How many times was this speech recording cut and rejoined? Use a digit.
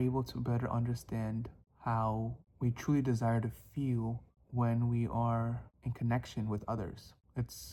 0